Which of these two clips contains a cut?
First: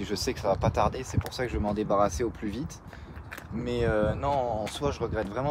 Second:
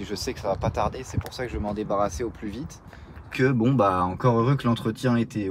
second; 1 cut; at 3.3 s

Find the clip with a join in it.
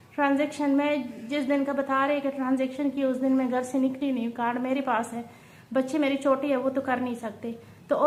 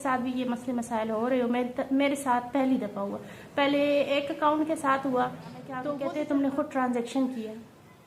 second; 1 cut; at 5.7 s

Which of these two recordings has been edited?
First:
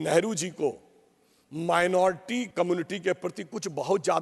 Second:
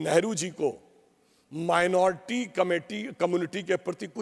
first; 1 cut; at 2.5 s

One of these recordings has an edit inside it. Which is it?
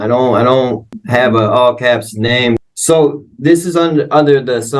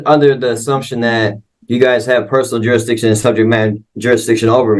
first; 2 cuts; at 1.0 s, 2.6 s

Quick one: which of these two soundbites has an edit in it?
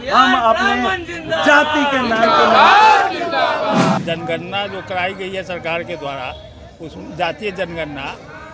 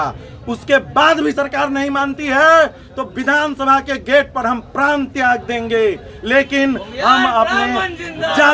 first; 1 cut; at 4.0 s

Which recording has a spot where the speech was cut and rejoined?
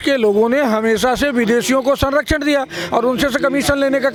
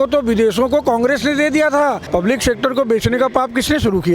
second; 1 cut; at 2.0 s

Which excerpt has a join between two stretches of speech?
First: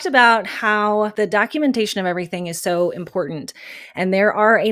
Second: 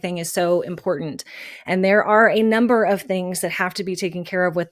first; 1 cut; at 1.1 s

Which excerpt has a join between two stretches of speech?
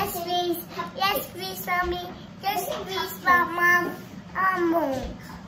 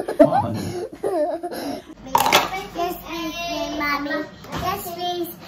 second; 1 cut; at 1.9 s

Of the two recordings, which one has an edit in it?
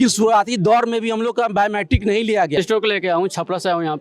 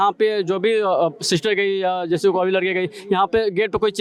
first; 1 cut; at 2.5 s

